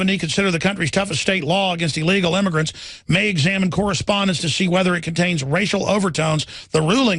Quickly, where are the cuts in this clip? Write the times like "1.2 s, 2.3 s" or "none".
2.3 s